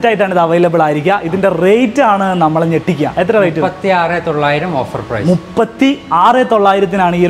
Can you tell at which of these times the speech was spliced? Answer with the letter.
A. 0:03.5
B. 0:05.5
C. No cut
C